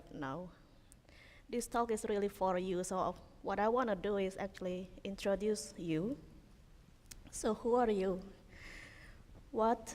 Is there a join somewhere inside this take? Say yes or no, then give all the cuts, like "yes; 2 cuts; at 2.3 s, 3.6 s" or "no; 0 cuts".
yes; 1 cut; at 7.9 s